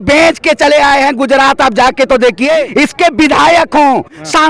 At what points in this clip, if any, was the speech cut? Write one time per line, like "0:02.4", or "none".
0:02.7